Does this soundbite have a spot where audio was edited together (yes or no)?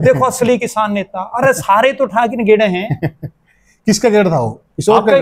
no